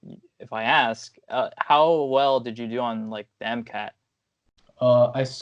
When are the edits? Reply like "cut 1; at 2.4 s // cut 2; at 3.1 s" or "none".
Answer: none